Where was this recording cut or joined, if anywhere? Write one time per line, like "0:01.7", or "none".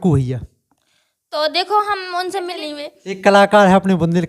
0:02.6